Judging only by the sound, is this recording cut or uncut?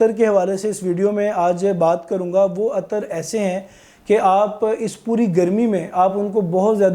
uncut